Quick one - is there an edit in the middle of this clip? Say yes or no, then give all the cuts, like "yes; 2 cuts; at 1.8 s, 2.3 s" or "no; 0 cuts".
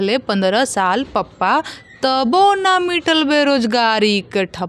no; 0 cuts